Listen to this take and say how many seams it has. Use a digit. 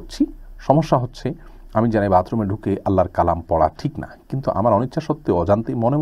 0